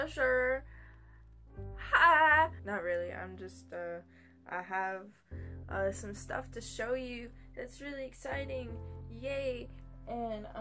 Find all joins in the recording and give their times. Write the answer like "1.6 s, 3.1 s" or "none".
2.0 s